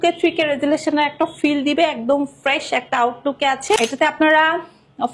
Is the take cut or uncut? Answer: cut